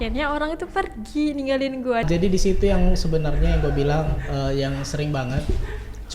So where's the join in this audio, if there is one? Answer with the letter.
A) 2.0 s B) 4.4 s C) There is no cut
A